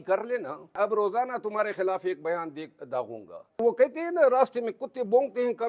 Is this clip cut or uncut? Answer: cut